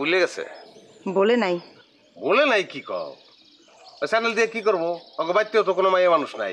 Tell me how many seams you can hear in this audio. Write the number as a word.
zero